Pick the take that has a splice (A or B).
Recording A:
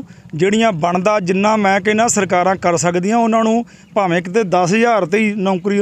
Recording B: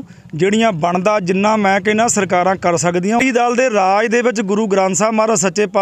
B